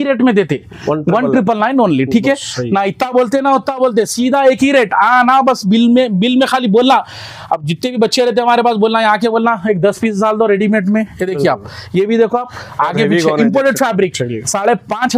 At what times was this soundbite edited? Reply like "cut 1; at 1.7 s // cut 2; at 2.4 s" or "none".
none